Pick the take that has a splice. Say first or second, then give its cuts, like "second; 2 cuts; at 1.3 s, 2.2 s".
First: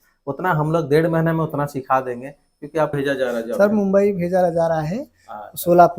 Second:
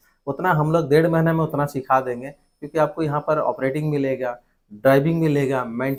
first; 1 cut; at 2.9 s